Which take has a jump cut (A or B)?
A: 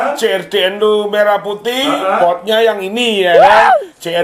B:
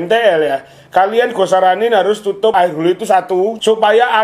B